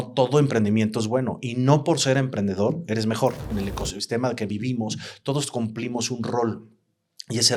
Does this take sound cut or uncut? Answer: cut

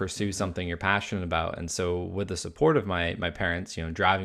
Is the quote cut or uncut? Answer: uncut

